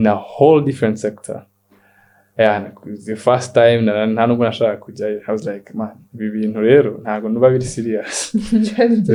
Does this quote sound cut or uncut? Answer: uncut